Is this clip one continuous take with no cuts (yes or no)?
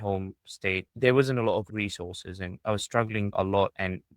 no